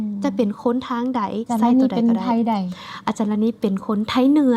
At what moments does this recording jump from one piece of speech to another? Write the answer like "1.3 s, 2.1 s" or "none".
1.5 s